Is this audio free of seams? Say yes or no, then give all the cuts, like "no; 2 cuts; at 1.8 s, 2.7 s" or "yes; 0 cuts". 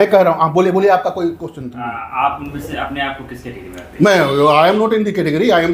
yes; 0 cuts